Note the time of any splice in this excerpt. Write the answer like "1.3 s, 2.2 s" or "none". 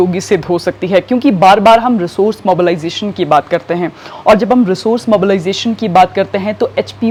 none